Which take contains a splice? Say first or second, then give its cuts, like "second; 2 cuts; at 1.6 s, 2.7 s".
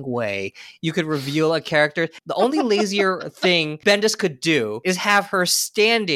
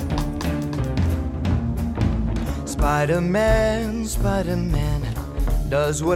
first; 3 cuts; at 2.1 s, 3.7 s, 4.8 s